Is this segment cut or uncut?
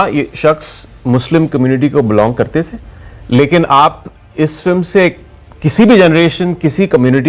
uncut